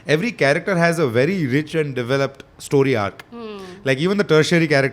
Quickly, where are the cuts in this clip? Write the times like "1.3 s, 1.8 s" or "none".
none